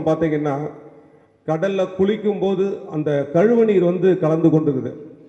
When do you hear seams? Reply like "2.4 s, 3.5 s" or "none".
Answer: none